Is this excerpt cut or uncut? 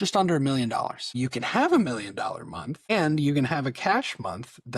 cut